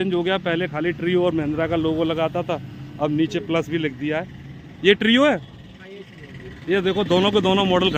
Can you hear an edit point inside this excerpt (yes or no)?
no